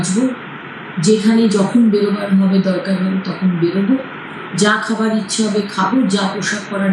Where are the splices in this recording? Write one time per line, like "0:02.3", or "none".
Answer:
none